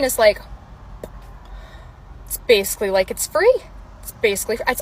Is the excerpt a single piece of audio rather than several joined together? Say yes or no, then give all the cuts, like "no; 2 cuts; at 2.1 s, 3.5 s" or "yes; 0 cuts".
yes; 0 cuts